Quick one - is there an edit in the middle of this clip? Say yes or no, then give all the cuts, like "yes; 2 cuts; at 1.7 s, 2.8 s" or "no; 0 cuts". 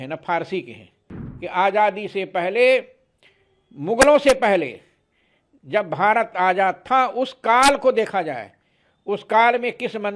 yes; 1 cut; at 1.0 s